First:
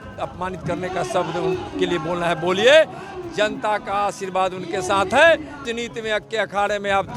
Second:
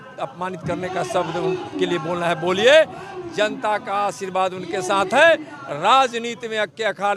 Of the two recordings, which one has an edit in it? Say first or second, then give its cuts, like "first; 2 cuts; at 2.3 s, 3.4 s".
first; 1 cut; at 5.7 s